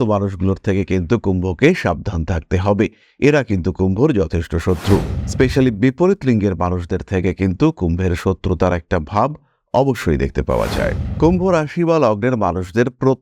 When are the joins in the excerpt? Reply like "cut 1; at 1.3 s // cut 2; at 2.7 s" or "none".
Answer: cut 1; at 5.2 s // cut 2; at 11.0 s